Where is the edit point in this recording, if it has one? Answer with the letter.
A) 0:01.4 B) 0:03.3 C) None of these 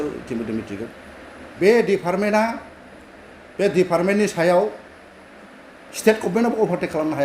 A